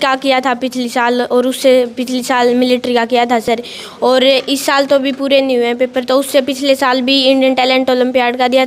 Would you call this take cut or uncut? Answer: uncut